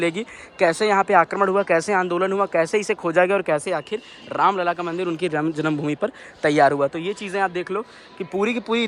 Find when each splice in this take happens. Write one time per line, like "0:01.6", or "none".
none